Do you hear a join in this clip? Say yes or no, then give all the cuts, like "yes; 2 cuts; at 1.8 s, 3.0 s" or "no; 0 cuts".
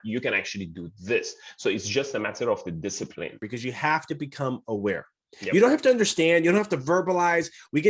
yes; 1 cut; at 3.4 s